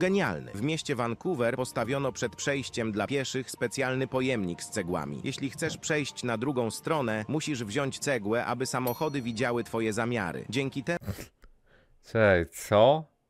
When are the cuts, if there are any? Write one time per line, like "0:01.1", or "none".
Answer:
none